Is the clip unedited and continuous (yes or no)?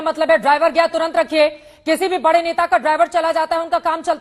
yes